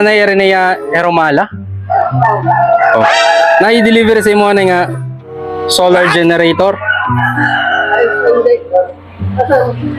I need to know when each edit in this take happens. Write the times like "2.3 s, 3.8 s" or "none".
none